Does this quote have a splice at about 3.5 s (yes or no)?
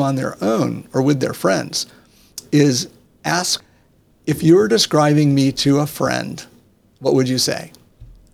yes